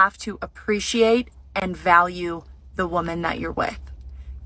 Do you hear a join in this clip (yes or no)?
no